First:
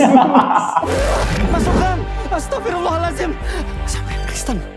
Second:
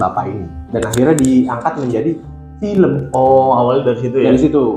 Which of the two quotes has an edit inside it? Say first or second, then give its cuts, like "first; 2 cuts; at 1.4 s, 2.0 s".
first; 1 cut; at 0.9 s